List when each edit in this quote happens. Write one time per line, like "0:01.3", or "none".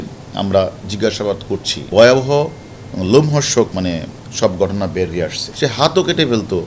0:03.7
0:05.4